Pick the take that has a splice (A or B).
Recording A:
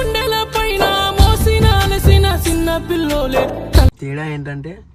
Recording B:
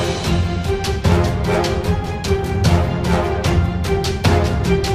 A